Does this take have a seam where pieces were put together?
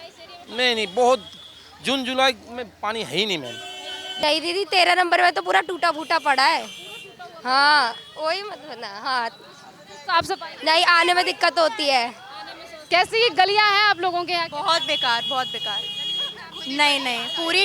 yes; 2 cuts; at 4.2 s, 12.7 s

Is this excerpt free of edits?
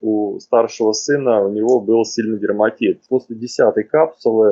no; 1 cut; at 3.0 s

